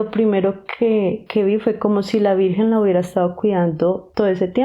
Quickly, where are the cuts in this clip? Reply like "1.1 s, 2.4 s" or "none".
none